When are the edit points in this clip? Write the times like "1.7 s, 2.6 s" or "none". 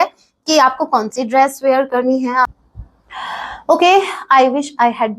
2.4 s